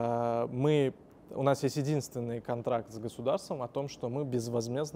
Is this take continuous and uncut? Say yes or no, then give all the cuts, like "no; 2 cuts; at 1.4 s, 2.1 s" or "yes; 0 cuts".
yes; 0 cuts